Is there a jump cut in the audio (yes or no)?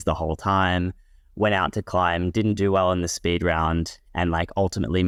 no